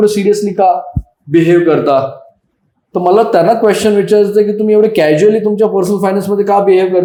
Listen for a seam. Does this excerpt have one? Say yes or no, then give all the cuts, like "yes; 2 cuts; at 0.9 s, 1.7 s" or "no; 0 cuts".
no; 0 cuts